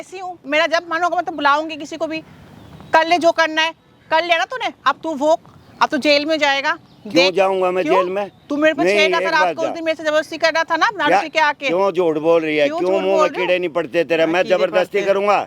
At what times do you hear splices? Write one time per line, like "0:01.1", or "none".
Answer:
none